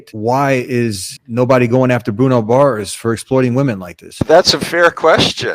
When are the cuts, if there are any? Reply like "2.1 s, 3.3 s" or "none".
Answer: 4.2 s